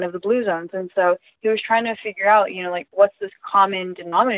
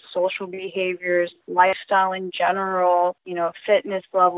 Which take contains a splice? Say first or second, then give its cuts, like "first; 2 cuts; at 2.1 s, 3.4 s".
second; 2 cuts; at 1.4 s, 3.2 s